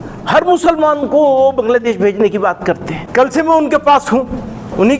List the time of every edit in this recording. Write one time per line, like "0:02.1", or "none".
0:03.0